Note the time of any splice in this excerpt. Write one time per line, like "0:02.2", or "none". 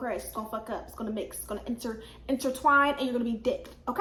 none

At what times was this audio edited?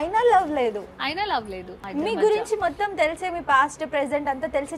0:01.8

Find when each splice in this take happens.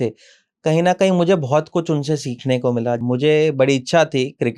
0:03.0

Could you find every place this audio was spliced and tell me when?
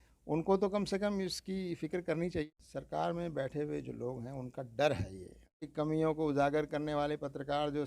0:02.4
0:05.7

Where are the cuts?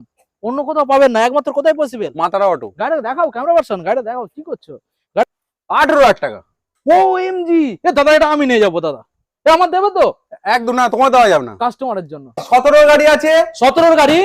0:05.2
0:12.4

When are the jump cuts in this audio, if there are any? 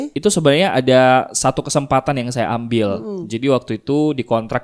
none

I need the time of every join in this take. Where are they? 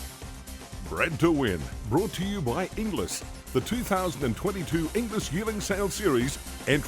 0:00.9

